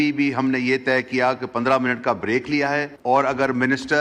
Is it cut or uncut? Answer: cut